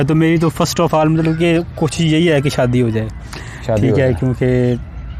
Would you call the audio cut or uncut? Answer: uncut